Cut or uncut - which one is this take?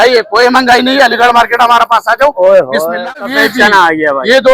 cut